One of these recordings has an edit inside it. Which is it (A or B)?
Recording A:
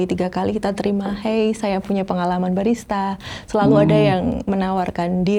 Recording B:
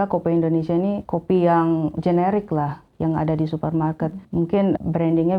B